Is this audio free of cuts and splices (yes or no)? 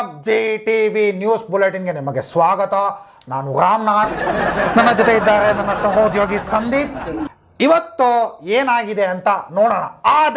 yes